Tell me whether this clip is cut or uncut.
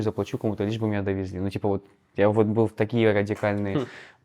uncut